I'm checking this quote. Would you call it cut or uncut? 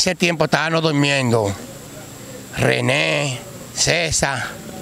uncut